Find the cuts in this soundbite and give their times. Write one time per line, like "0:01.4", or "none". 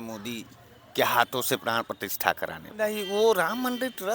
0:02.7